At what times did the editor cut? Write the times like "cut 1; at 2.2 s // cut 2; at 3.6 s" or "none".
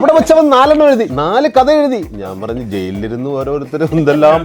cut 1; at 1.1 s